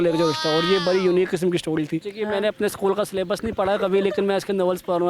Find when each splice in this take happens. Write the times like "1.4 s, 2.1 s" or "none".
2.1 s